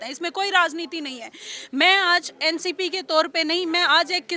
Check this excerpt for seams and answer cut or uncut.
uncut